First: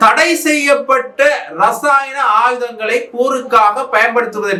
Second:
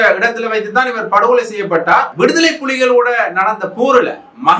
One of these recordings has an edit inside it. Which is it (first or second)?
second